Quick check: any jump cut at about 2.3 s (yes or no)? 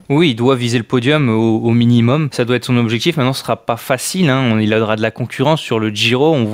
yes